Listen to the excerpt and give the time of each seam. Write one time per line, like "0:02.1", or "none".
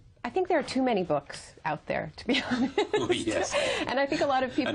0:02.7